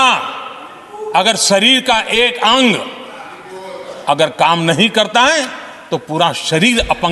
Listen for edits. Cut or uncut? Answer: uncut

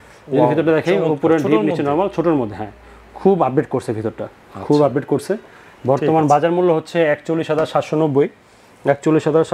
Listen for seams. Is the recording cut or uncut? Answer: uncut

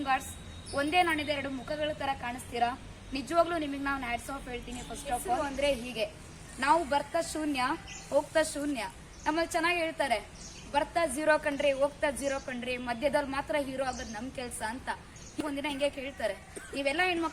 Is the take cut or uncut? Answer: cut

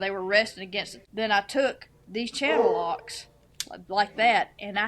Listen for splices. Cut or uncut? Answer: cut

